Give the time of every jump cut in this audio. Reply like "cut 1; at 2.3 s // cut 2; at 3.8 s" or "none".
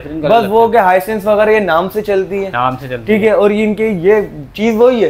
none